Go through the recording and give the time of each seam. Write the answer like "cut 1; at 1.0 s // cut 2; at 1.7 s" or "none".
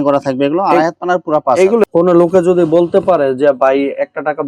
cut 1; at 1.8 s